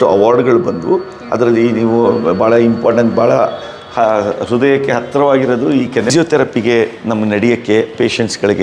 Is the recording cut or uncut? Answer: cut